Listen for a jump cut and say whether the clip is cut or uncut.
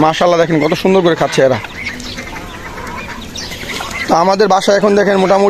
uncut